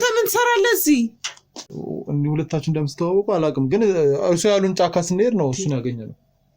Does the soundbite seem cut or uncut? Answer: cut